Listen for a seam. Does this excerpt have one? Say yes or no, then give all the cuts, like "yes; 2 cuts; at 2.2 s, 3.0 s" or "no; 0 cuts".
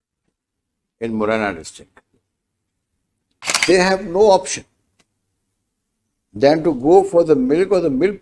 yes; 1 cut; at 3.6 s